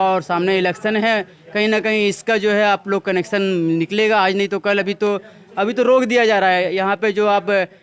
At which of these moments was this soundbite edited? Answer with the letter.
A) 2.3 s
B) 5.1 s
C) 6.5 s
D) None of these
D